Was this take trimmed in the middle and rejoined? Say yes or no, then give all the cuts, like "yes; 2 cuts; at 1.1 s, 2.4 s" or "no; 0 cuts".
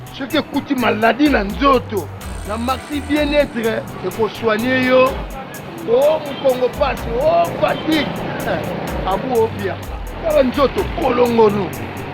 no; 0 cuts